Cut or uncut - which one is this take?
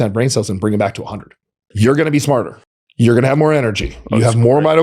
cut